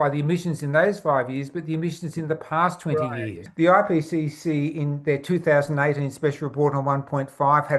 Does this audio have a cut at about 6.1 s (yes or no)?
no